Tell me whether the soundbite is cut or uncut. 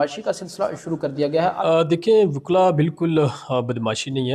cut